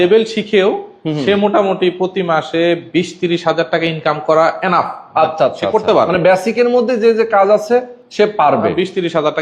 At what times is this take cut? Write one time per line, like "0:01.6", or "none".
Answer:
none